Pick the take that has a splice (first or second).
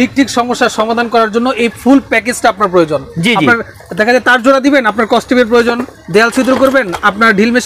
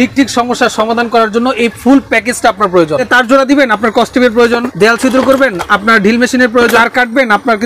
second